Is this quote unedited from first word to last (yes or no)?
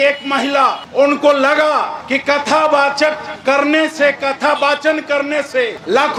yes